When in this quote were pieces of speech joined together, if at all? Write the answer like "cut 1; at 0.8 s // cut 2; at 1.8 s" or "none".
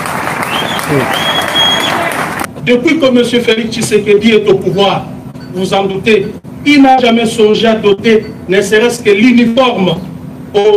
cut 1; at 2.5 s